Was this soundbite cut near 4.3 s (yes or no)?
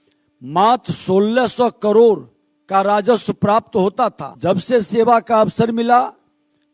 yes